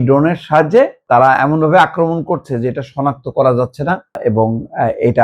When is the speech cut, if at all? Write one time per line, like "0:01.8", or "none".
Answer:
0:01.0
0:04.2